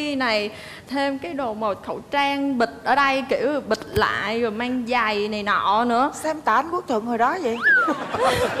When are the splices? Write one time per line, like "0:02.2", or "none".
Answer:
none